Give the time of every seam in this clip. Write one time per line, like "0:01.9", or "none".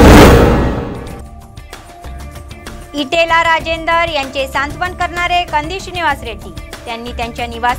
0:02.0